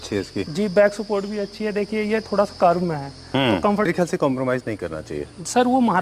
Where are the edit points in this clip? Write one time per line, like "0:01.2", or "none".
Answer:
0:03.9

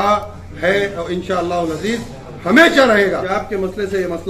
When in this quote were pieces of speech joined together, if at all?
0:03.3

